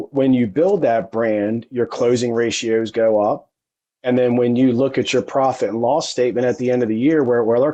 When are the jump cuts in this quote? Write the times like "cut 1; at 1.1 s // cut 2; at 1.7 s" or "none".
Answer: none